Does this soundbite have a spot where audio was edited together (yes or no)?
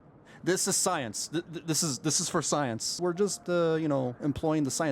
yes